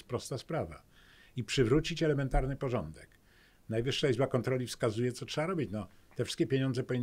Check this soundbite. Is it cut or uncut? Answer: uncut